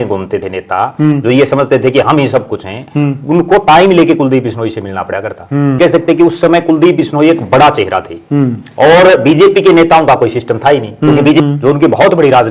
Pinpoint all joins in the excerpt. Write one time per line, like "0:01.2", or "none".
0:05.8
0:11.4